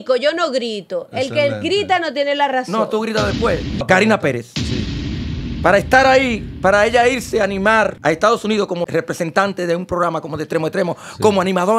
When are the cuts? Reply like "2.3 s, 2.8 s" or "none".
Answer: 3.8 s, 8.0 s, 8.9 s